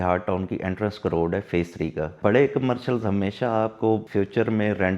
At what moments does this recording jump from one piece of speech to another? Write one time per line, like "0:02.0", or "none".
0:02.1
0:04.1